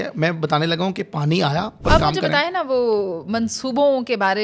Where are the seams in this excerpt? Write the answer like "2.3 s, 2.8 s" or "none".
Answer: 1.8 s